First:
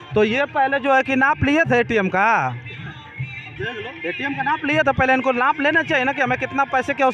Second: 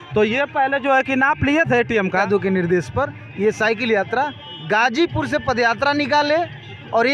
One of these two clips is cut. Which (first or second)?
second